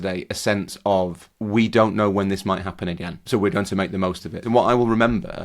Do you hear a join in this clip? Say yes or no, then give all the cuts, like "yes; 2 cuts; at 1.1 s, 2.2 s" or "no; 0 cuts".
yes; 3 cuts; at 1.3 s, 3.1 s, 4.4 s